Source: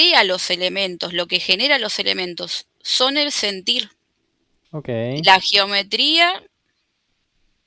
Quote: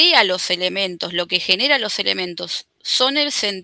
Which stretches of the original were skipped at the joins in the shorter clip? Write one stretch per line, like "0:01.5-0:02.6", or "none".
none